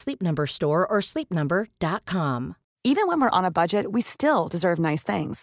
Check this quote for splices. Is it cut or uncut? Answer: cut